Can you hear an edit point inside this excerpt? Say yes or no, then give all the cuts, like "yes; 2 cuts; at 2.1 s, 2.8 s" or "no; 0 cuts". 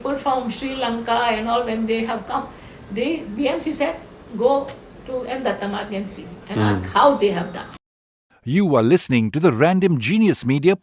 yes; 1 cut; at 8.0 s